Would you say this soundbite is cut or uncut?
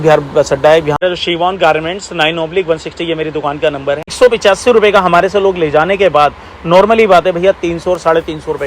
cut